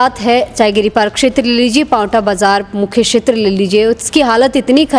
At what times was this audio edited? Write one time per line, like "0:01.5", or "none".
none